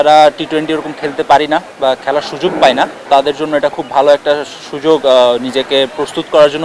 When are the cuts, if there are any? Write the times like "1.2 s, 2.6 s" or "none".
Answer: 3.0 s